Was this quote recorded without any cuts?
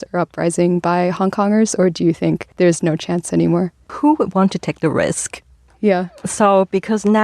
no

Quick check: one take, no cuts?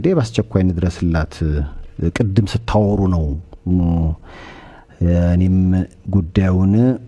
yes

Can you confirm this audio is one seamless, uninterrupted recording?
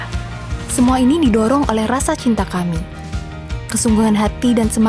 yes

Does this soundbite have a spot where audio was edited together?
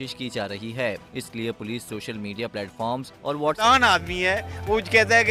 yes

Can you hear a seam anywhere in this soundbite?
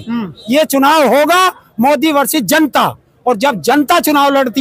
no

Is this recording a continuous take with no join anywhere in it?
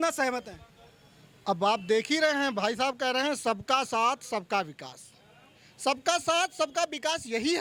yes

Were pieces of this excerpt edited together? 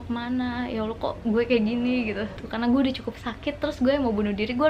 yes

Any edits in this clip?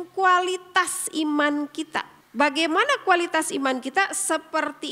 yes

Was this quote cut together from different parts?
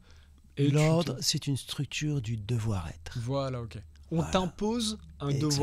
no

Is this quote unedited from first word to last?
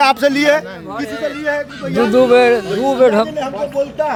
yes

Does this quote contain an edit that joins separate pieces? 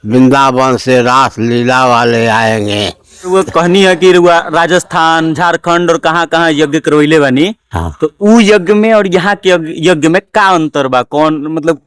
yes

